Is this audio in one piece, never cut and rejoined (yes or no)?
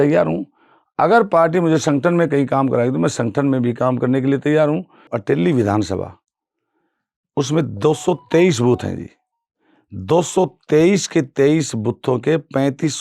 no